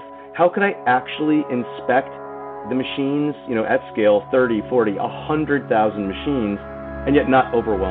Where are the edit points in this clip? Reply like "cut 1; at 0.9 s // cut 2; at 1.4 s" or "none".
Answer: cut 1; at 2.6 s // cut 2; at 6.9 s